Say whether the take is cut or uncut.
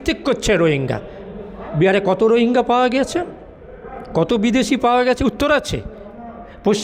uncut